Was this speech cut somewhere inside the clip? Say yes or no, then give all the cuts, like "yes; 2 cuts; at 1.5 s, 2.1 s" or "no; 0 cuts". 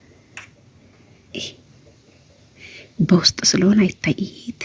no; 0 cuts